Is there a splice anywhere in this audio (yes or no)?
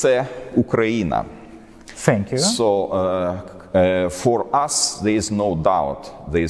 no